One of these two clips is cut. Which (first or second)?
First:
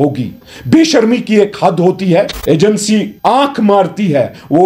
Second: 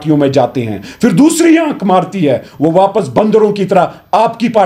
first